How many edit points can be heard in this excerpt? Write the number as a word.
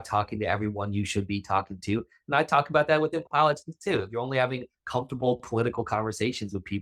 zero